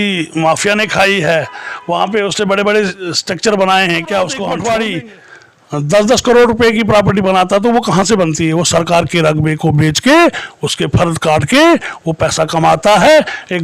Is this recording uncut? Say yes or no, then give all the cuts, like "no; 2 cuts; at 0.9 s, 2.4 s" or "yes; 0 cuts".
no; 1 cut; at 4.4 s